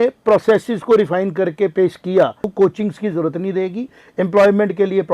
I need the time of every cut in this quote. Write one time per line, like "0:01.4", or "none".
0:02.5